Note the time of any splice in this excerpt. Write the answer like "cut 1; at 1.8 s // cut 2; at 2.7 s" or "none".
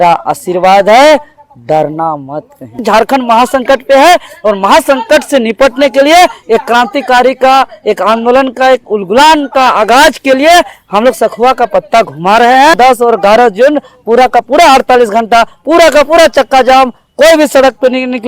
cut 1; at 2.8 s // cut 2; at 12.8 s